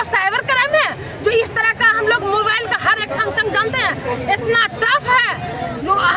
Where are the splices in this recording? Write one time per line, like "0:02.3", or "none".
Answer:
none